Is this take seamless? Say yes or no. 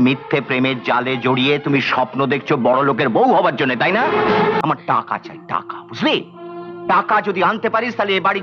no